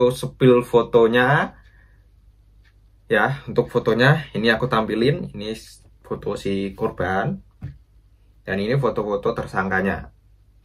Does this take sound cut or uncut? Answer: uncut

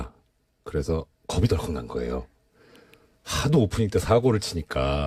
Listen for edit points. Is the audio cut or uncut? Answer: uncut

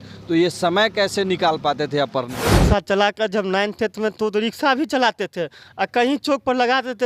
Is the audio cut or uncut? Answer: cut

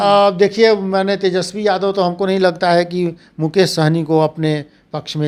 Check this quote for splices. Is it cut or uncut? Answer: uncut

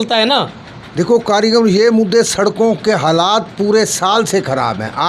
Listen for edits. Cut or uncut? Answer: uncut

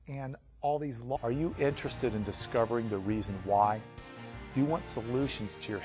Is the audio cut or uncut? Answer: uncut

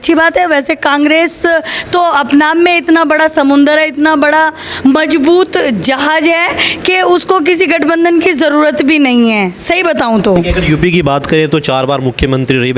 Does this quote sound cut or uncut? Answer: uncut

